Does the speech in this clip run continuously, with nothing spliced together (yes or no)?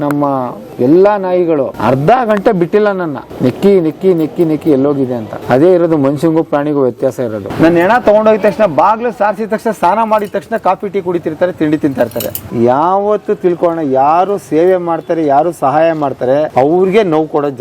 no